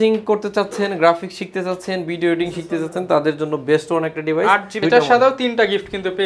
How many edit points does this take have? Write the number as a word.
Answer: one